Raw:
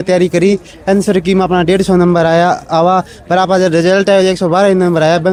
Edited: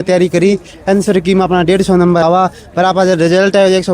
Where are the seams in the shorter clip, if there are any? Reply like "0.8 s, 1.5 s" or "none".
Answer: 2.2 s